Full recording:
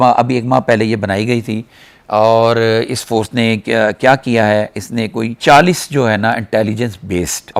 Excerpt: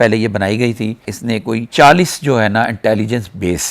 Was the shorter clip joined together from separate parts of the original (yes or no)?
yes